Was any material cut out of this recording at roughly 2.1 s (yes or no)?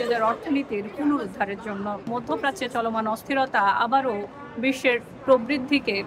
yes